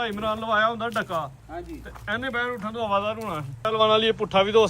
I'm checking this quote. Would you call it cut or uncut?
cut